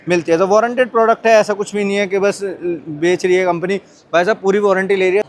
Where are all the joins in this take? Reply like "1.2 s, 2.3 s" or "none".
none